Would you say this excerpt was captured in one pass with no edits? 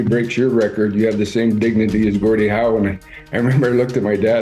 yes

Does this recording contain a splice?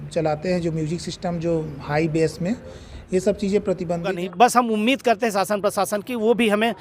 yes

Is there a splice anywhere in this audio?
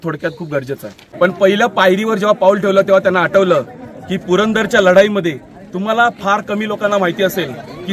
yes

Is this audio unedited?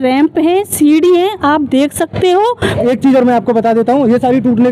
no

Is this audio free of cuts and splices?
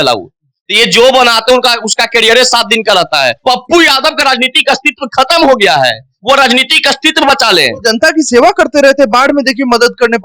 no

